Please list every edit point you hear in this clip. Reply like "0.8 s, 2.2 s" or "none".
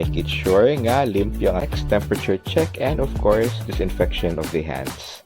1.7 s